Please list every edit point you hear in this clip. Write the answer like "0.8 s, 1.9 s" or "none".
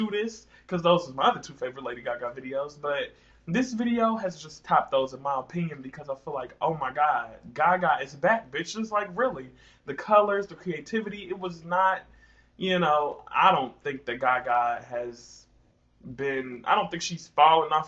14.9 s